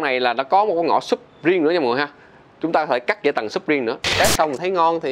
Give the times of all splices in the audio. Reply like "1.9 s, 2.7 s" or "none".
4.2 s